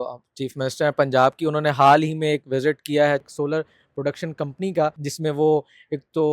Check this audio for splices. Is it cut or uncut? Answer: cut